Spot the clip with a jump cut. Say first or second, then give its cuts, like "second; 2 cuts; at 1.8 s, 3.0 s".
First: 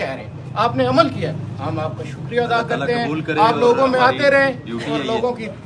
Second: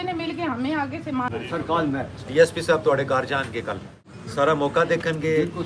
second; 2 cuts; at 1.2 s, 3.9 s